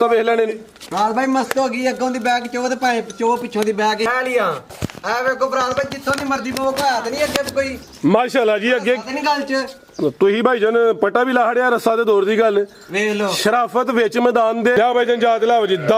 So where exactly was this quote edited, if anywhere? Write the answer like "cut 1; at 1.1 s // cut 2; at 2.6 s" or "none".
cut 1; at 4.1 s // cut 2; at 14.8 s